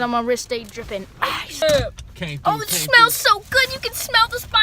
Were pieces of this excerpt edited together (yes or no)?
yes